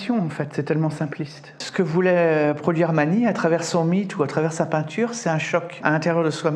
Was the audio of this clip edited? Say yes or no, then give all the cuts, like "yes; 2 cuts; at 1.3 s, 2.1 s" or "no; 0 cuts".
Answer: yes; 2 cuts; at 1.6 s, 5.7 s